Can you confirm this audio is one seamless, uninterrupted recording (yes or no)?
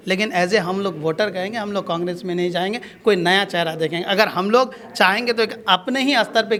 yes